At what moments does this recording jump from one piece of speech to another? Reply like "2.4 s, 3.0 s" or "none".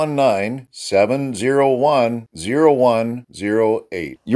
none